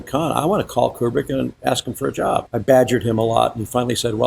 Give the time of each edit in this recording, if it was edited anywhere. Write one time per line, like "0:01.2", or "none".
0:02.5